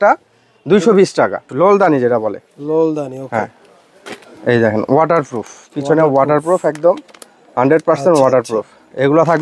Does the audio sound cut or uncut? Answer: cut